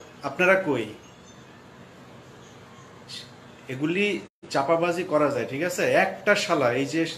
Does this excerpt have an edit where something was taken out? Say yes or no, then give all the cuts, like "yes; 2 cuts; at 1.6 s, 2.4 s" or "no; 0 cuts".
no; 0 cuts